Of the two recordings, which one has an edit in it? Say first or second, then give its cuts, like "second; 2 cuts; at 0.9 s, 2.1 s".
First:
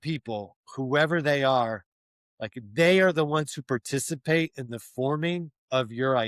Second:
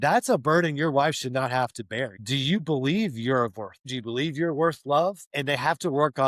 second; 3 cuts; at 2.2 s, 3.8 s, 5.3 s